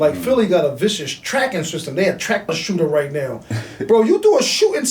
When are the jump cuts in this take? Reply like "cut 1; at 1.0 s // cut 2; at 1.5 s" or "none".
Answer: cut 1; at 2.6 s